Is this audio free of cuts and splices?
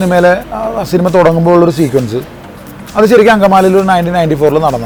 yes; 0 cuts

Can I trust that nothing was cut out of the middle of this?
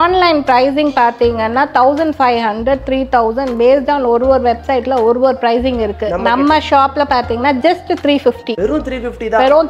yes; 0 cuts

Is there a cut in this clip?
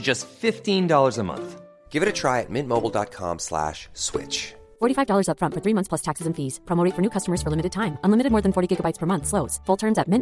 no; 0 cuts

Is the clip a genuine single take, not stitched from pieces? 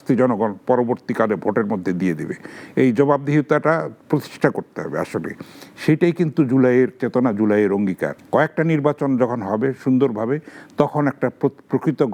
no; 1 cut; at 8.1 s

